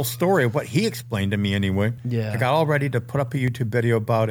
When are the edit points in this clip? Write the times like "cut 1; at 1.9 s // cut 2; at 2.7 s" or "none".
cut 1; at 2.0 s